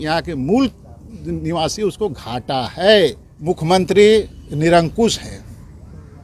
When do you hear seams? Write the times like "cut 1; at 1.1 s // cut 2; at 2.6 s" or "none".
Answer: cut 1; at 3.3 s